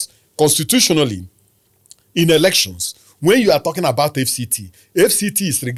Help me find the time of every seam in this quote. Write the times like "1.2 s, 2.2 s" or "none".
none